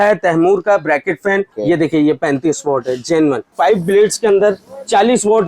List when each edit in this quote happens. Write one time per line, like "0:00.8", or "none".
0:01.5
0:03.5